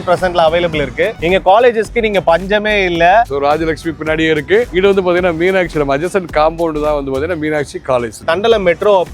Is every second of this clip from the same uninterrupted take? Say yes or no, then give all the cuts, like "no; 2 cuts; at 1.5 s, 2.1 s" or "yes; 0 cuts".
no; 2 cuts; at 3.3 s, 8.2 s